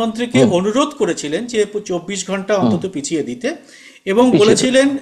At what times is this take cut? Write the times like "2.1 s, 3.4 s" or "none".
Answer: none